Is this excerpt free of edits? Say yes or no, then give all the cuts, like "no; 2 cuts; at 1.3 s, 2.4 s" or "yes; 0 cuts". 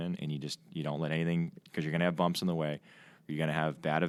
yes; 0 cuts